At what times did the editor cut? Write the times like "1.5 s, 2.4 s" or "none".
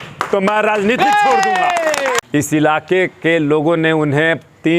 2.2 s

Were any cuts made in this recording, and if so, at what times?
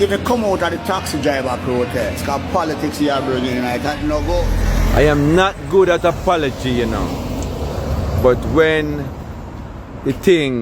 4.5 s

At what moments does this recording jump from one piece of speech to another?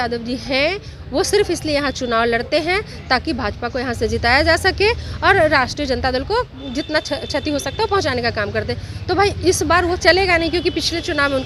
none

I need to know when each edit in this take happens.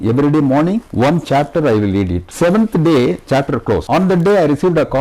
0.9 s, 2.2 s, 3.8 s

